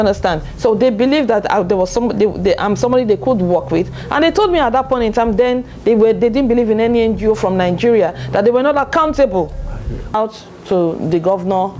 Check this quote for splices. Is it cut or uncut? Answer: cut